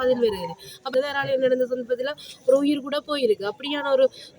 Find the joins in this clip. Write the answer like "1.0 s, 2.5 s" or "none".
0.9 s